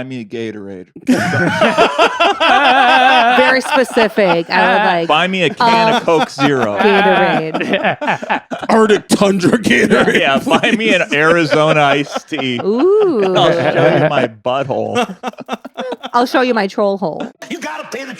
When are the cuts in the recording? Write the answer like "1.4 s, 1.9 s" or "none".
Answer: 17.3 s